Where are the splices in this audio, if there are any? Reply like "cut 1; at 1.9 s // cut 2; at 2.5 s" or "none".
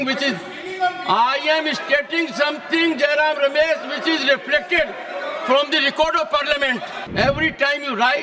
cut 1; at 7.0 s

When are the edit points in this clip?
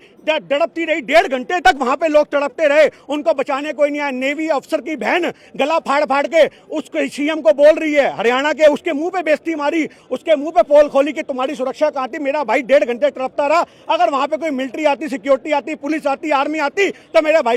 none

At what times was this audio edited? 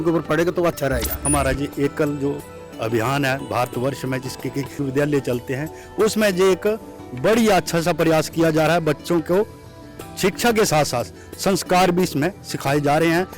cut 1; at 1.1 s // cut 2; at 4.8 s

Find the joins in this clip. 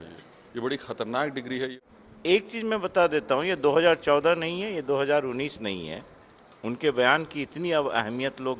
cut 1; at 1.8 s

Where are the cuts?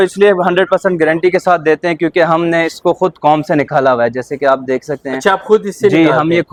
none

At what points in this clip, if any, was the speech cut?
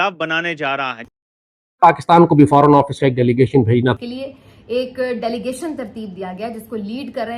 cut 1; at 1.1 s // cut 2; at 4.0 s

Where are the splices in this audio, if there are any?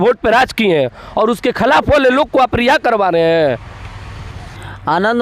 cut 1; at 4.0 s

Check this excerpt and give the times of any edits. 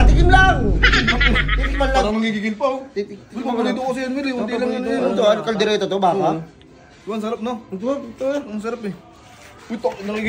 none

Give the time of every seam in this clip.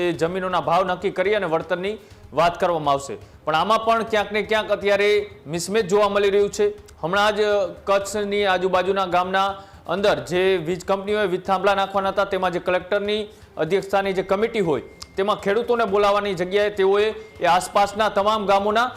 none

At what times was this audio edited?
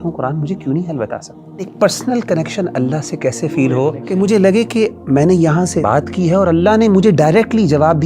cut 1; at 1.7 s // cut 2; at 4.0 s // cut 3; at 5.8 s

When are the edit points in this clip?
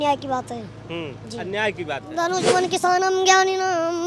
cut 1; at 2.0 s

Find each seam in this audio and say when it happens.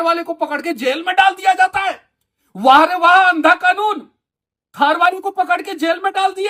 none

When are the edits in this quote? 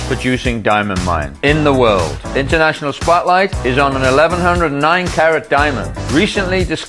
none

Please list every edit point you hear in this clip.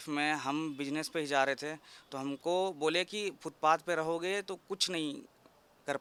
none

